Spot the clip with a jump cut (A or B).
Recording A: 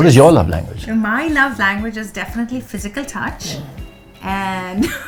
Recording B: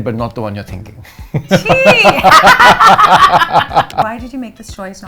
B